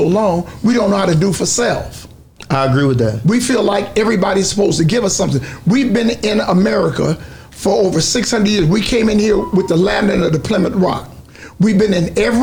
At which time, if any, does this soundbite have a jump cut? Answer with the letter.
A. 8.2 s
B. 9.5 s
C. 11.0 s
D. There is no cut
D